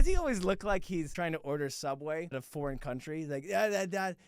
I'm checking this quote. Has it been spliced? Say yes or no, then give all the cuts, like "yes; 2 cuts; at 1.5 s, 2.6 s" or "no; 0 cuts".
yes; 2 cuts; at 1.1 s, 2.4 s